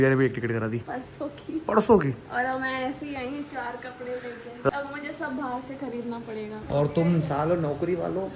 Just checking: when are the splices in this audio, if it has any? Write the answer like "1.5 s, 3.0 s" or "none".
0.8 s, 6.6 s